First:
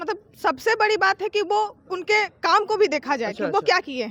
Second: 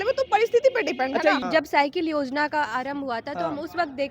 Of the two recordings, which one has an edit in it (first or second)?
second